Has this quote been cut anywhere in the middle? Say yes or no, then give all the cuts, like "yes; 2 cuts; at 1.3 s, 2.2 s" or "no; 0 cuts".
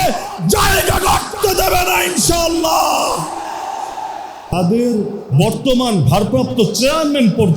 yes; 1 cut; at 4.5 s